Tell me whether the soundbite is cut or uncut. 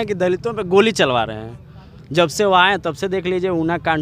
uncut